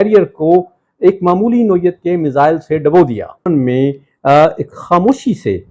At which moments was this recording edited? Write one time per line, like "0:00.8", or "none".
0:03.5